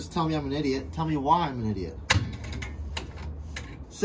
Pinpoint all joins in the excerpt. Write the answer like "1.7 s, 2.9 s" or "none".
none